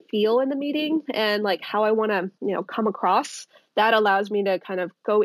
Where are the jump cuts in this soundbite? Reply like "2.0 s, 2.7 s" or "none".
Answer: 3.6 s